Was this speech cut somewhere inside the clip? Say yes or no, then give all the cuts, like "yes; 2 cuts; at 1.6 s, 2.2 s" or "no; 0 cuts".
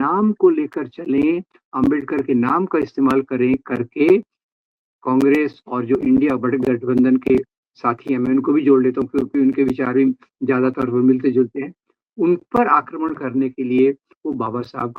no; 0 cuts